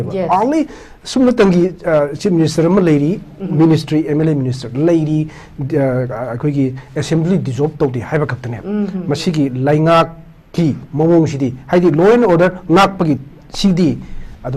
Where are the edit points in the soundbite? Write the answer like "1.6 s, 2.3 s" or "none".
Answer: none